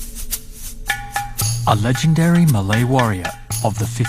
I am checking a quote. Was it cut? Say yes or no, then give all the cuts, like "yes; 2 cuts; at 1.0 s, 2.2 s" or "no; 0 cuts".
yes; 1 cut; at 1.0 s